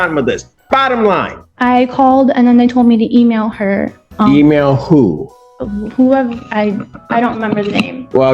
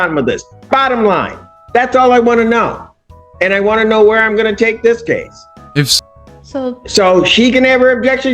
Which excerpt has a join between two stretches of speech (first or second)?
first